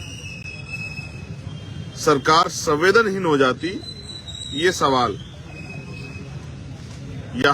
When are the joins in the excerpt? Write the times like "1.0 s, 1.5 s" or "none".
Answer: none